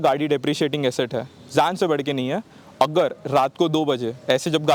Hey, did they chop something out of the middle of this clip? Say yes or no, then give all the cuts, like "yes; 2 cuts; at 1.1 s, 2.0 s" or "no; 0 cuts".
no; 0 cuts